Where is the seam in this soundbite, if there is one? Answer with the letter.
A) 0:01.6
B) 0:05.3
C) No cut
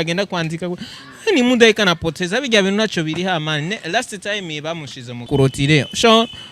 B